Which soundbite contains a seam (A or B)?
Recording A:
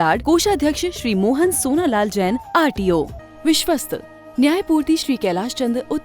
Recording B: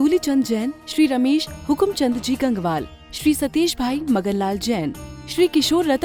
A